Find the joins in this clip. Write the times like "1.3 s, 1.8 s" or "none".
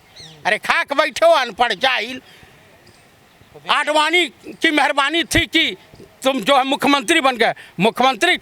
none